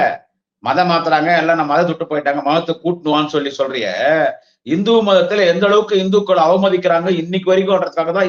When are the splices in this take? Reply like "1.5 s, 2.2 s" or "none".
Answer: none